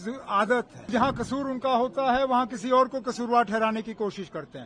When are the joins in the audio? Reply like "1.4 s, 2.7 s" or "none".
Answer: 0.9 s